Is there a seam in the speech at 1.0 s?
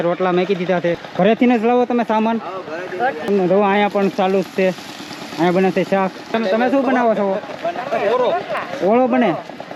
yes; 3 cuts; at 1.0 s, 3.3 s, 6.3 s

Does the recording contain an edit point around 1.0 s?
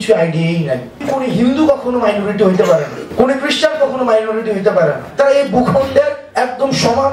yes; 4 cuts; at 1.0 s, 3.0 s, 5.1 s, 6.2 s

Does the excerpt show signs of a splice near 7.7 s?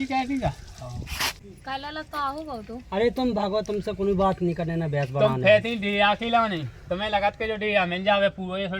no; 1 cut; at 1.5 s

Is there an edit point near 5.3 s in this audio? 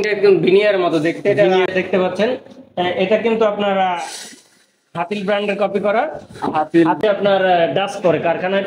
no; 2 cuts; at 1.7 s, 7.0 s

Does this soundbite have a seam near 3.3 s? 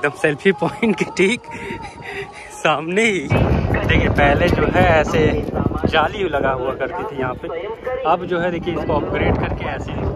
yes; 1 cut; at 3.3 s

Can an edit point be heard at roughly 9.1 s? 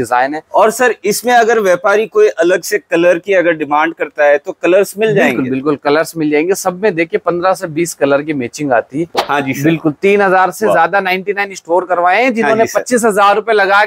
yes; 1 cut; at 9.1 s

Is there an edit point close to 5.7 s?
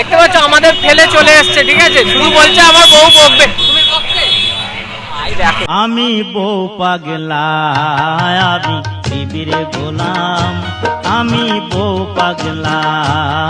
yes; 1 cut; at 5.7 s

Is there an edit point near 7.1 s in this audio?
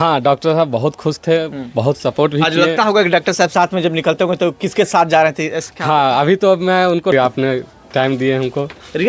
yes; 1 cut; at 7.1 s

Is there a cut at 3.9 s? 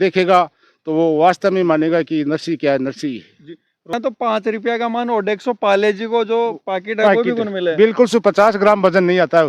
yes; 1 cut; at 3.9 s

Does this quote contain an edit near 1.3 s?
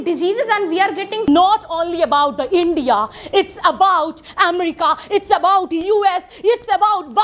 yes; 1 cut; at 1.3 s

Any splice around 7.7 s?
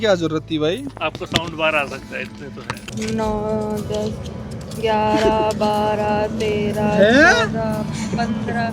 no; 2 cuts; at 0.9 s, 2.8 s

